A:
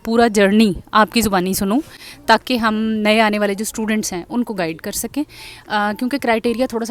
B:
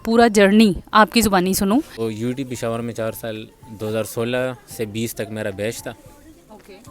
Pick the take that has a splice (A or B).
B